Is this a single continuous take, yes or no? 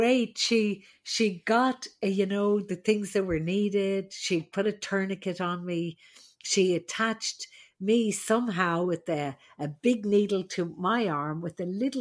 yes